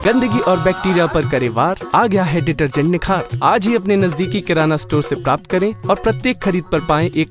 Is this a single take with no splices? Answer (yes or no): yes